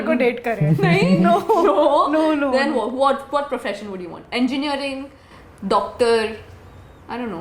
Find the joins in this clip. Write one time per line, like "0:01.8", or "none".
none